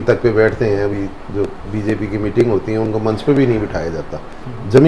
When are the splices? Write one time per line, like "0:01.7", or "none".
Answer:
none